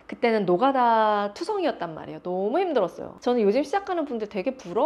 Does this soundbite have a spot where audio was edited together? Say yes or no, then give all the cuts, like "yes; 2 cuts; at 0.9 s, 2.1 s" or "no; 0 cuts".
yes; 1 cut; at 3.1 s